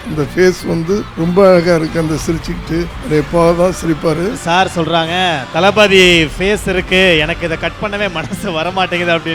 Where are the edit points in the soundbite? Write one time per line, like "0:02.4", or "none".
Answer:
0:01.1
0:03.0
0:04.4